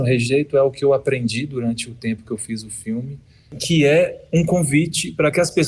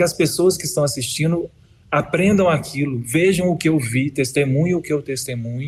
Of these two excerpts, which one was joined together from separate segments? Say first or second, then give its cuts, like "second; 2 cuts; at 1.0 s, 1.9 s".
first; 1 cut; at 3.6 s